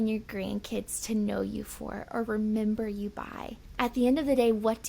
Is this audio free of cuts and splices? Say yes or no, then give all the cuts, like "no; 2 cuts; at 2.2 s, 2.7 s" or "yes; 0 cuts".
no; 1 cut; at 3.6 s